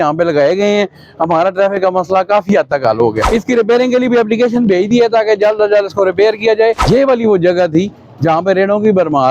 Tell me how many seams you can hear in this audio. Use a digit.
2